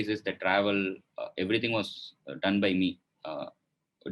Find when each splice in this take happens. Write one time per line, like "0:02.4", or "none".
none

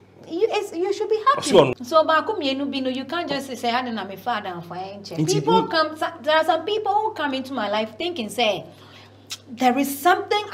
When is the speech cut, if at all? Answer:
0:01.7

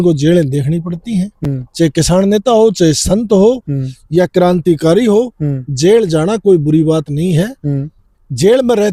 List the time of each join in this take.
none

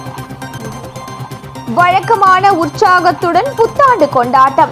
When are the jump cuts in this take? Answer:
0:01.5

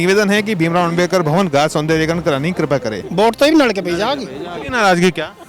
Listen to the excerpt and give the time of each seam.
0:03.0

